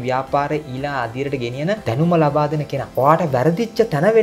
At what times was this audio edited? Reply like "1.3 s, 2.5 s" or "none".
1.8 s, 2.8 s